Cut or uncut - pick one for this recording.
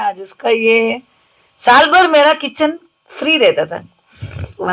uncut